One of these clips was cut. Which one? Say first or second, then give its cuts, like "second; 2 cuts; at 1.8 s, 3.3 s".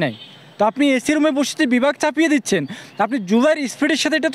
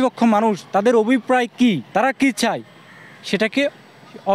second; 1 cut; at 1.8 s